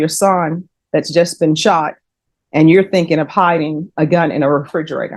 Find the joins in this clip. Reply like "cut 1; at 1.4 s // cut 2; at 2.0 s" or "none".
none